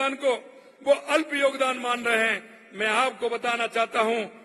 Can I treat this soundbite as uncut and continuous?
yes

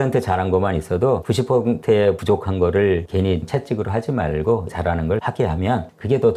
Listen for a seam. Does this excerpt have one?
yes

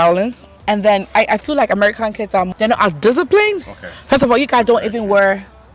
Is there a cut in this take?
no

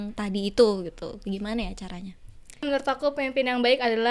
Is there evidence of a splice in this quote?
yes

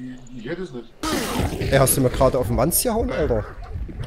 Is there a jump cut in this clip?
yes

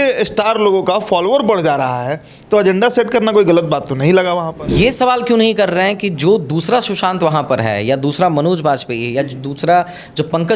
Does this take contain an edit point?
yes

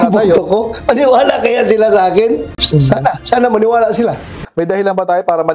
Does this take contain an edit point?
yes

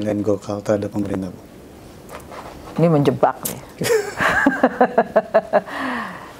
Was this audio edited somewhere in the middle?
no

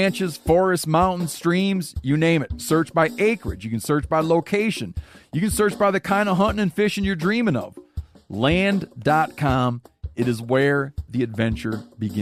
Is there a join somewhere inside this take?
no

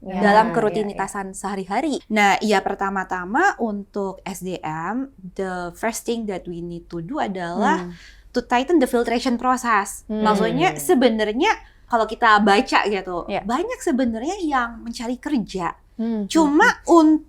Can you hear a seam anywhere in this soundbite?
yes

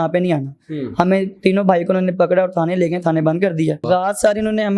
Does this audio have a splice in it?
yes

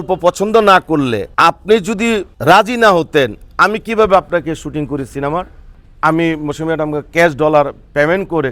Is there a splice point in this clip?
yes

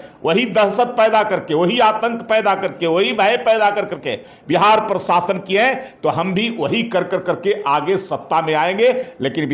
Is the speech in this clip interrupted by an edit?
no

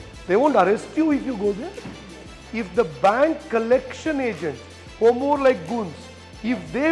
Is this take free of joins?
no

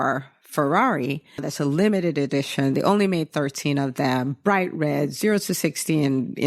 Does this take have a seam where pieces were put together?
yes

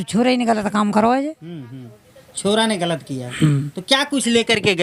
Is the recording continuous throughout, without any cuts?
yes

